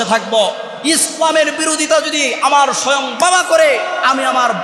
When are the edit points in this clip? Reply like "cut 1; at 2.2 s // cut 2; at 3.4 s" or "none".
none